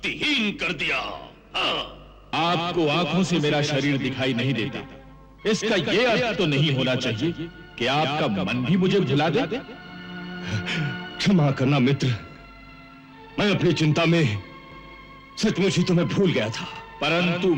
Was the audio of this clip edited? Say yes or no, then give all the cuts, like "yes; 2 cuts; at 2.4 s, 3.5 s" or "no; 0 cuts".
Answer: yes; 1 cut; at 2.3 s